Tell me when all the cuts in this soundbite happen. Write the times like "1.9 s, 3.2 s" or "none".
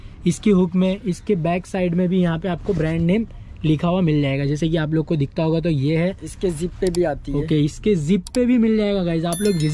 none